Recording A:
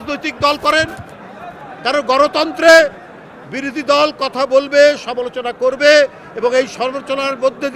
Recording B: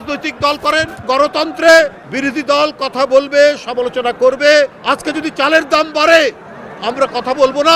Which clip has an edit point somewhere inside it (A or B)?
B